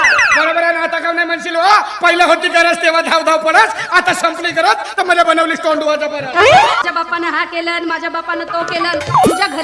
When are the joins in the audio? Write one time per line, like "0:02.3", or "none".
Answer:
0:06.8

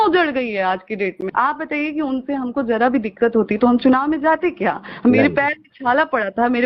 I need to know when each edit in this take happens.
0:01.2

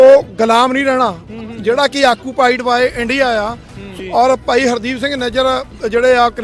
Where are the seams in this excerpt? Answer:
0:03.9

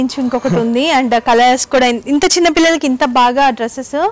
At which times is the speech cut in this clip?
none

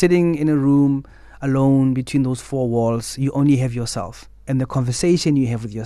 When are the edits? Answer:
none

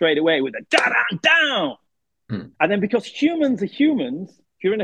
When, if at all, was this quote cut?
none

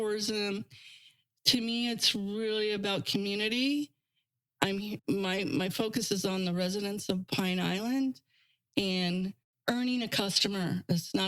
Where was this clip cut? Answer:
0:05.0
0:09.5

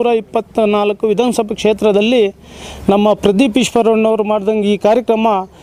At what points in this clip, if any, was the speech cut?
none

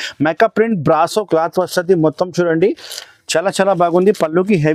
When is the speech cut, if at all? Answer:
none

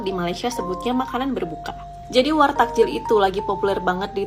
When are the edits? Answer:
none

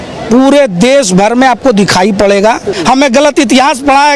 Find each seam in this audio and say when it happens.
0:02.7

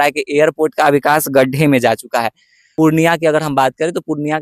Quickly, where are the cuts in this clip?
0:02.7

